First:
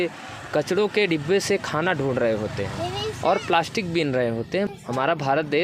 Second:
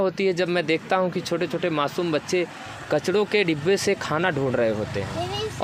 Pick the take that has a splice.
first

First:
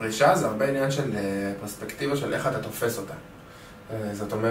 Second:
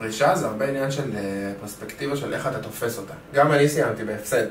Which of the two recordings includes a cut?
second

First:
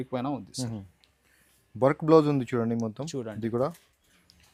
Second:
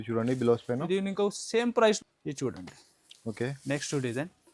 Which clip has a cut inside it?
second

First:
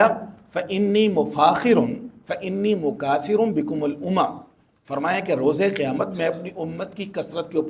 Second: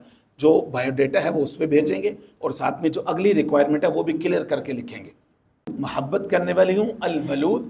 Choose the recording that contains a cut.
second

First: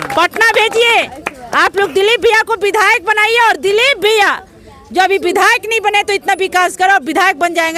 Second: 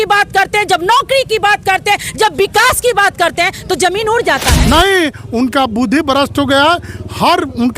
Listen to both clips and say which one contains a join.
second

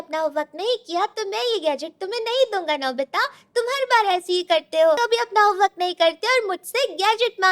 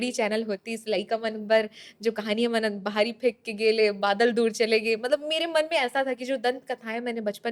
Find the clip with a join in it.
first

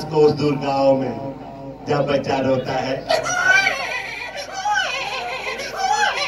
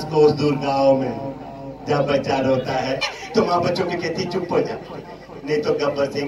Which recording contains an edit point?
second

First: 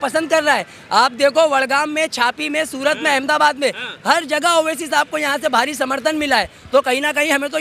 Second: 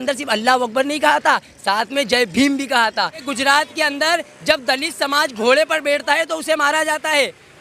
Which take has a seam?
second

